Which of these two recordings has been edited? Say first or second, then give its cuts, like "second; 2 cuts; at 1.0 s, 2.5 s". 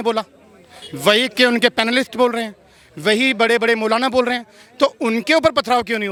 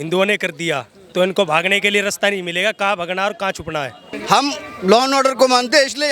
second; 1 cut; at 4.0 s